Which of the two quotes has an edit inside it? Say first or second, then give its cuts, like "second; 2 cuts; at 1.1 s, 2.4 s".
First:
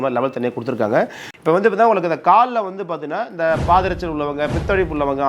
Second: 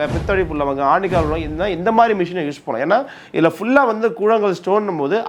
first; 1 cut; at 1.3 s